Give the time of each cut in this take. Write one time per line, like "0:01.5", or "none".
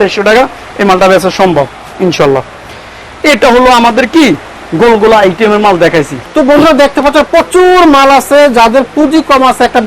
none